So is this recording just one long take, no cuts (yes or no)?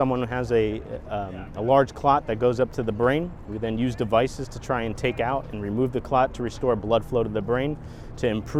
yes